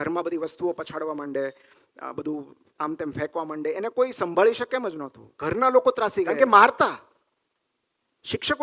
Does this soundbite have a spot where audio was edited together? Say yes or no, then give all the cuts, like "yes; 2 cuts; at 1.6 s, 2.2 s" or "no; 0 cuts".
yes; 1 cut; at 6.3 s